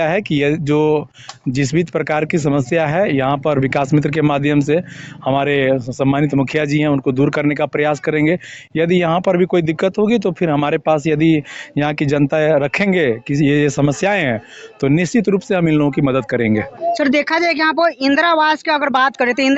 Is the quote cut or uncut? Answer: uncut